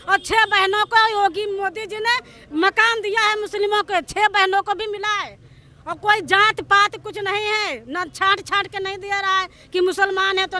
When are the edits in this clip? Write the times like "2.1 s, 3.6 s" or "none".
none